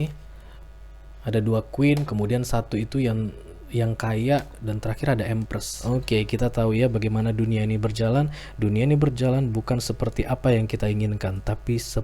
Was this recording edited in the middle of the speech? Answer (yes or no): yes